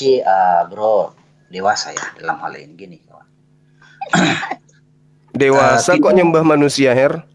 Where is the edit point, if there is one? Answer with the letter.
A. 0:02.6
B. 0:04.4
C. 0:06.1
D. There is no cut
D